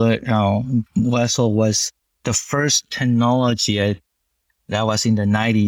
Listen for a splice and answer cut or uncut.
uncut